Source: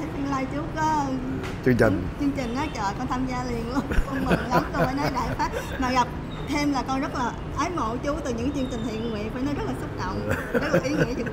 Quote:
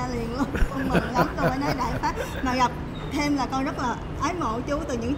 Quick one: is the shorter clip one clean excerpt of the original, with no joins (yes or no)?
yes